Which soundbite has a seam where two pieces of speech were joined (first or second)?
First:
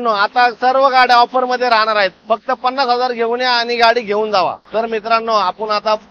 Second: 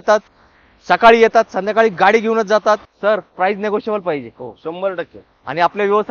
first